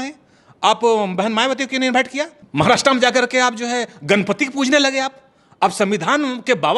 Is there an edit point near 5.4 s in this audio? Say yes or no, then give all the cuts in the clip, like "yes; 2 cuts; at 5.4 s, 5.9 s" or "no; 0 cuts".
no; 1 cut; at 2.4 s